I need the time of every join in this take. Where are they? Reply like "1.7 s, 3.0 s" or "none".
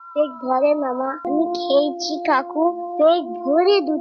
1.2 s